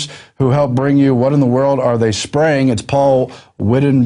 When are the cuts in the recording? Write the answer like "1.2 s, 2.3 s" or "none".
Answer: none